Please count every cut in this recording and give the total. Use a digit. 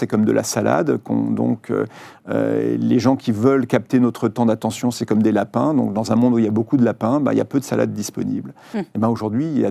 0